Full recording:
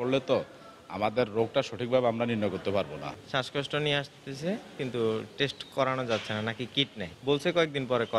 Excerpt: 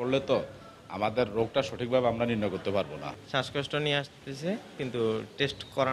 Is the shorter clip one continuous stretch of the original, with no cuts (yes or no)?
yes